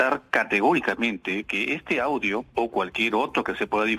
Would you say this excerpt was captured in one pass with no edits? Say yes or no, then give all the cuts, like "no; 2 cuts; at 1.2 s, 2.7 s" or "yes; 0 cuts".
yes; 0 cuts